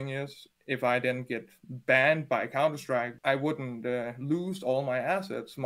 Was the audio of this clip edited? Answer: yes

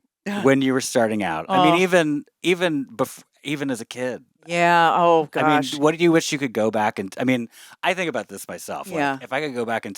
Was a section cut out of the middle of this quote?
no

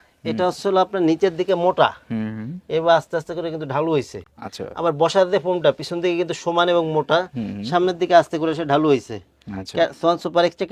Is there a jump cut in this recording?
no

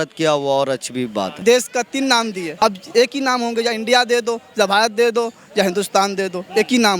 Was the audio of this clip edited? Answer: yes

